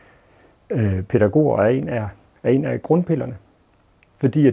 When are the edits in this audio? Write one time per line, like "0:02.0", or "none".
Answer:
none